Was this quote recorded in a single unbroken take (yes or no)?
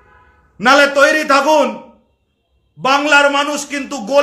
yes